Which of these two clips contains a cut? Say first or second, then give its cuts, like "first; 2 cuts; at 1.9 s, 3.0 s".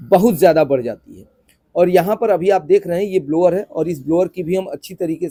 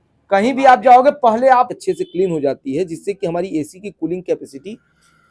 second; 1 cut; at 1.7 s